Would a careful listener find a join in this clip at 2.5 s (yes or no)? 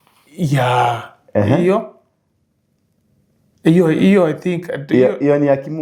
no